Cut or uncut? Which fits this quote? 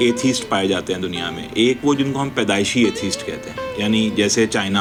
uncut